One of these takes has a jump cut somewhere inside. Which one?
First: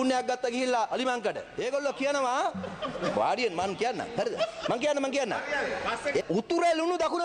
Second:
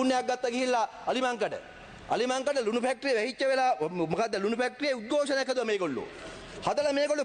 first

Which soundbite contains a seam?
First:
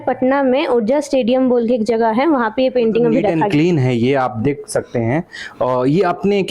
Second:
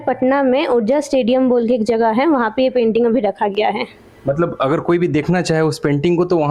first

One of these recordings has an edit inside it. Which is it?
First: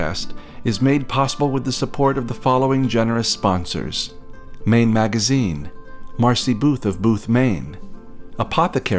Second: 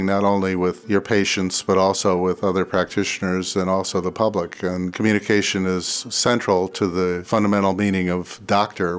second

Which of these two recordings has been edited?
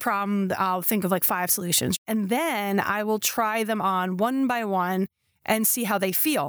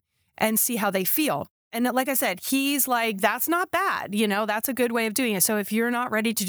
first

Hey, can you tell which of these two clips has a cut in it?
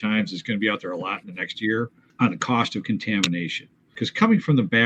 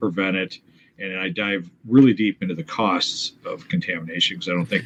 first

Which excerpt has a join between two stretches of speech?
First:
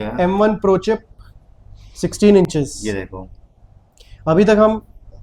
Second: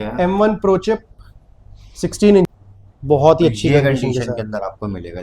second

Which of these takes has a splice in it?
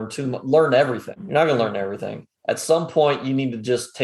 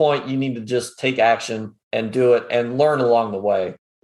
first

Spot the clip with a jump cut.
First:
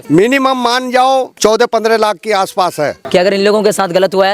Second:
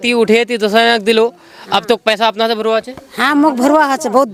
first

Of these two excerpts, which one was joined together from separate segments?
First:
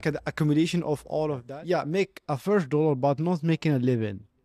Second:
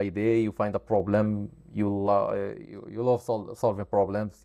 first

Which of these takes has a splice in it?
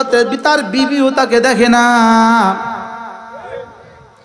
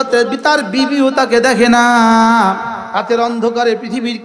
second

